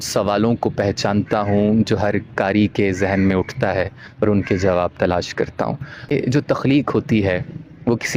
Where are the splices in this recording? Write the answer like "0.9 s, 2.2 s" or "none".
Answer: 6.1 s

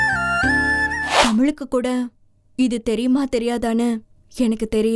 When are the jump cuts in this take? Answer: 1.1 s

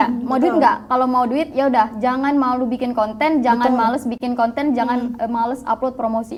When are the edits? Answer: none

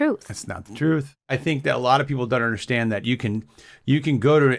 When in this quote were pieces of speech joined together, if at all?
1.3 s

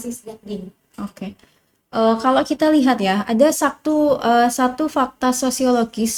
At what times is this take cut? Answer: none

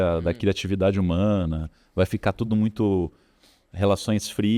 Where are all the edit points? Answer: none

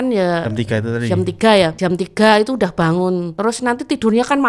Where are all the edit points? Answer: 1.7 s, 3.3 s

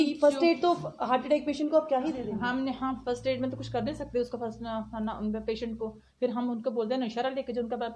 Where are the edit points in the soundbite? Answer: none

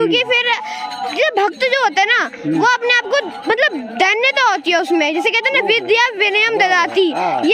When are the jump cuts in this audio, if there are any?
none

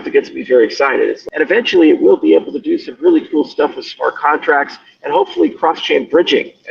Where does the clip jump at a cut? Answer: 1.2 s

